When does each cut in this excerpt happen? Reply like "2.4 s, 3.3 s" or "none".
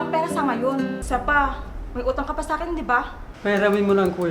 1.0 s, 3.2 s